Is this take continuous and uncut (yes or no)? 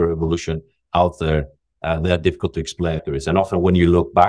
no